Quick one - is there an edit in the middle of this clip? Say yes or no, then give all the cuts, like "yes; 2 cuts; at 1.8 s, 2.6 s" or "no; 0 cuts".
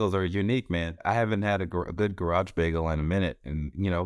yes; 1 cut; at 1.0 s